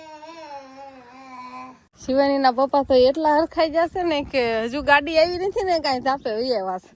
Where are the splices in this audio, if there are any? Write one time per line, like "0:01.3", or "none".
0:01.9

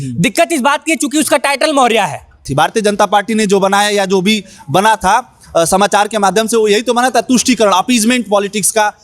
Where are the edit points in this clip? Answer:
0:02.4

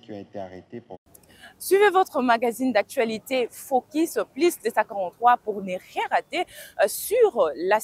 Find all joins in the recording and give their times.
0:01.0

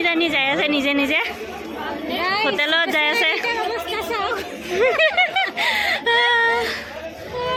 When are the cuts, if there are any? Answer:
none

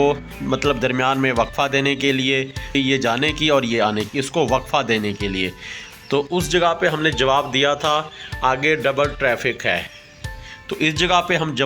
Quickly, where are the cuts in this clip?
0:02.8

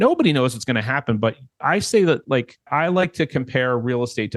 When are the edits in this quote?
0:01.5
0:02.6

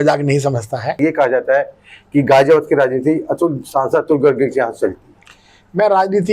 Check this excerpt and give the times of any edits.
0:01.0

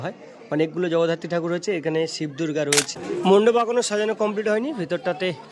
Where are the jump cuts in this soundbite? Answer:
0:02.9

